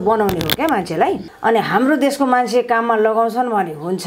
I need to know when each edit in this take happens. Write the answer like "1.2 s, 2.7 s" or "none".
1.3 s